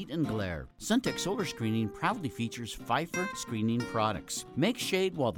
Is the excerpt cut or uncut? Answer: cut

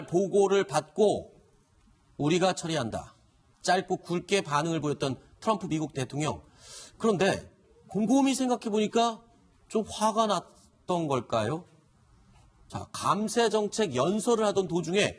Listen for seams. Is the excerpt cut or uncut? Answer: cut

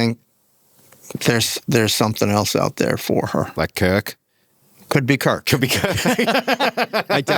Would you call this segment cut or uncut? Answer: uncut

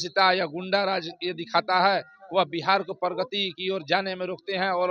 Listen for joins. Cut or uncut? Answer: uncut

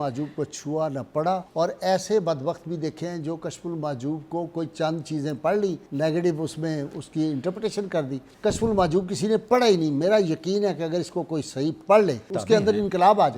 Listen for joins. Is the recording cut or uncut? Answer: cut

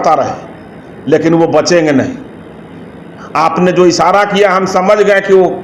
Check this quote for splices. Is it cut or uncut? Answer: uncut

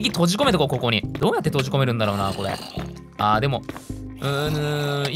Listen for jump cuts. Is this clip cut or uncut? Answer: cut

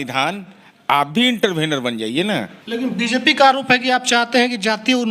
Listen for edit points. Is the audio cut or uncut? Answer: cut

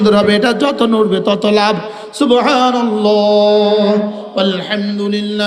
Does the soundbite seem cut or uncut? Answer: uncut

